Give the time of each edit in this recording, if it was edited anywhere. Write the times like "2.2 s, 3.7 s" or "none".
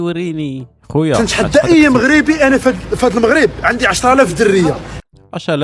1.2 s